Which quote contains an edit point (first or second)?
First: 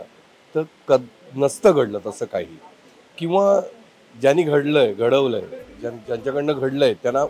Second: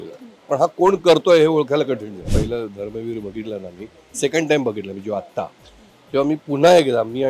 second